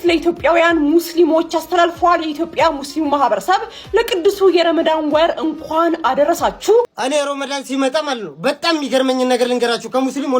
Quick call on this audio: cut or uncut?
cut